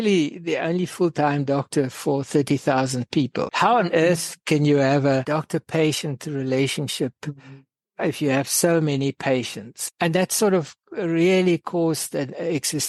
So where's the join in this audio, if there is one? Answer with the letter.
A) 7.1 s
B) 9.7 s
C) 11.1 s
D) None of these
D